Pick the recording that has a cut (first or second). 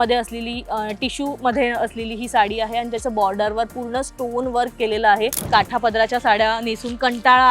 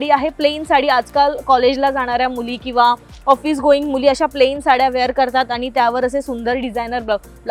first